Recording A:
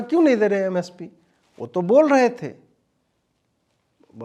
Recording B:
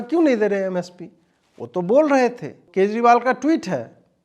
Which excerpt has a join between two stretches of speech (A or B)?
B